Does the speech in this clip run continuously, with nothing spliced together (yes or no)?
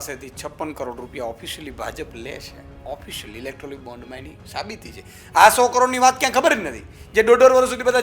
yes